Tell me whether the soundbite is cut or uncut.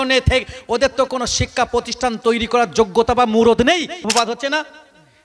cut